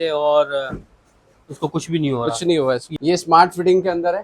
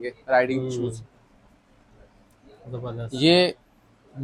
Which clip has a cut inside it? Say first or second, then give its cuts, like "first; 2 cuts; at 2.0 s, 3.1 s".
first; 1 cut; at 2.9 s